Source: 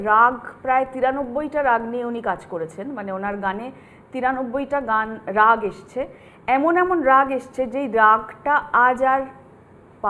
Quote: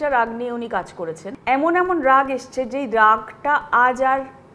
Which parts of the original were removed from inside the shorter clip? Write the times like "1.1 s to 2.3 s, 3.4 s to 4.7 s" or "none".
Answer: 2.8 s to 6.3 s